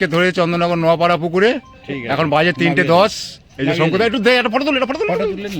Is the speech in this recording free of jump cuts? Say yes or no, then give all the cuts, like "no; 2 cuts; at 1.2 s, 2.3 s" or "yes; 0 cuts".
yes; 0 cuts